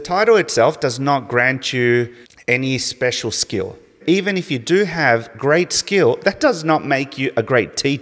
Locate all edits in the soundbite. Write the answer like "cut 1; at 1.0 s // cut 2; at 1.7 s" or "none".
cut 1; at 2.3 s // cut 2; at 4.0 s